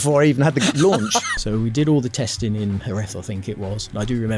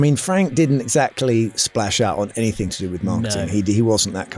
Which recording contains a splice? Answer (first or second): first